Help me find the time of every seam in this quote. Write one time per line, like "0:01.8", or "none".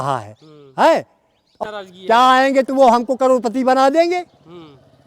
0:01.6